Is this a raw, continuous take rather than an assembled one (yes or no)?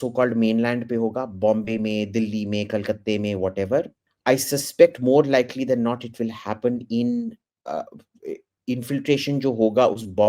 no